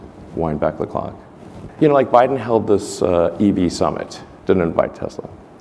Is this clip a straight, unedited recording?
yes; 0 cuts

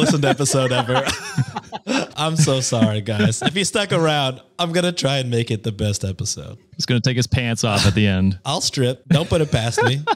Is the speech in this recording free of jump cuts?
no; 3 cuts; at 2.1 s, 6.8 s, 8.7 s

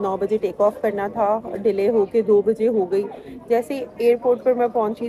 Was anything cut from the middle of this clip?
no; 0 cuts

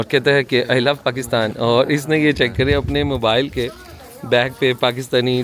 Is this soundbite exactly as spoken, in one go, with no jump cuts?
yes; 0 cuts

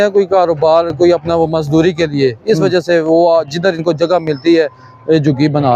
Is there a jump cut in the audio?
no; 0 cuts

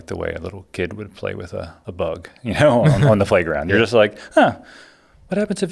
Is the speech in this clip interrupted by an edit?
yes; 1 cut; at 1.8 s

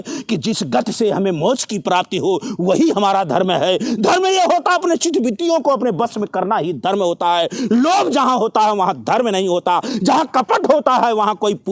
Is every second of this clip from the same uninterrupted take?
yes; 0 cuts

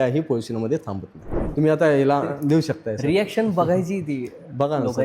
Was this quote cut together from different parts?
yes; 1 cut; at 1.4 s

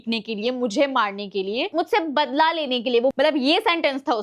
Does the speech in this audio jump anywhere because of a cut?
yes; 1 cut; at 3.1 s

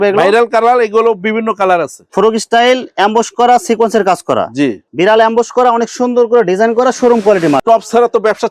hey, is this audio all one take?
no; 3 cuts; at 2.0 s, 4.8 s, 7.6 s

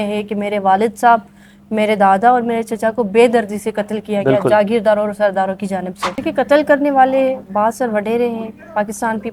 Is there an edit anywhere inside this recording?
yes; 1 cut; at 6.0 s

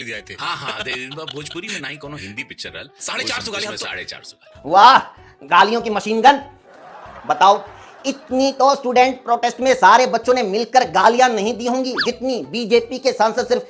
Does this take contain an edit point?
no; 0 cuts

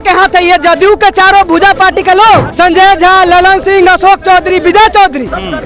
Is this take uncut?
no; 1 cut; at 2.5 s

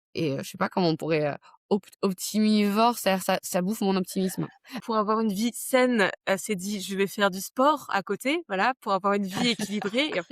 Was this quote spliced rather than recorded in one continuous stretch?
yes; 1 cut; at 4.7 s

